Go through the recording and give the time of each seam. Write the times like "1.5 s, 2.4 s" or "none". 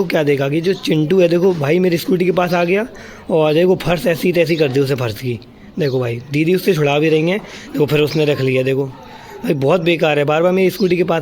none